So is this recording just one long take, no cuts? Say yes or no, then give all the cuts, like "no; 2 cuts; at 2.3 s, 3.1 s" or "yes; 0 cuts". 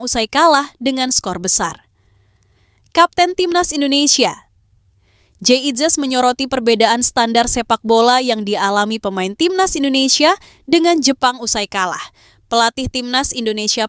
yes; 0 cuts